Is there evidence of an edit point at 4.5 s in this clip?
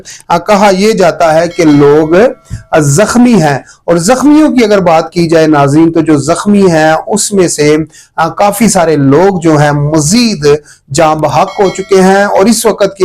no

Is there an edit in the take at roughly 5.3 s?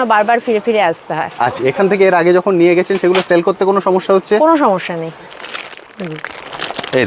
yes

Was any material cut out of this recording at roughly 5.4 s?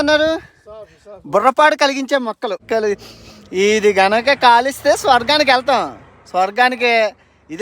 no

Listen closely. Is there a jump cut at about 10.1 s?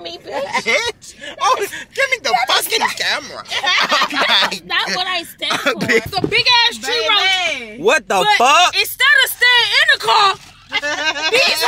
no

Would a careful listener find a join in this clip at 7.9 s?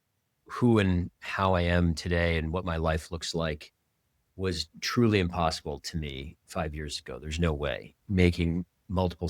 yes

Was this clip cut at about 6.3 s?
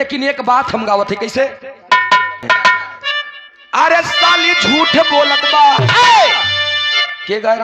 no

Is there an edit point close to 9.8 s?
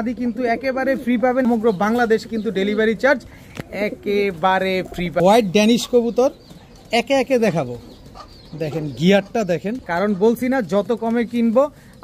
yes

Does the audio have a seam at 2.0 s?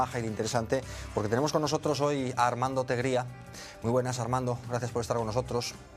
yes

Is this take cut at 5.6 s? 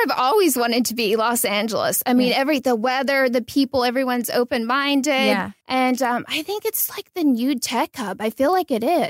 yes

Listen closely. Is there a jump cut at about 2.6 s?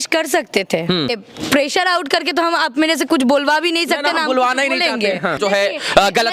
no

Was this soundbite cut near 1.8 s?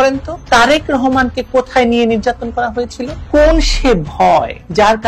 no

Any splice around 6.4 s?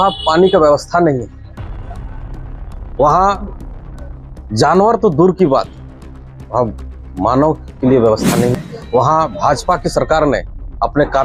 no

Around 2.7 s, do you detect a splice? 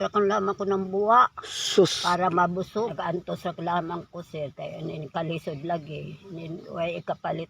yes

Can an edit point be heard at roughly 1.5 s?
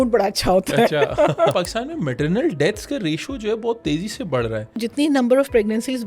yes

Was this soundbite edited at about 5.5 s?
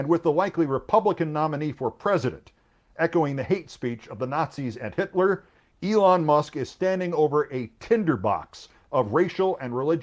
yes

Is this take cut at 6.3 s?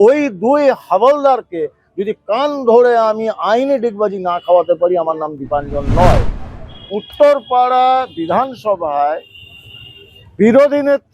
yes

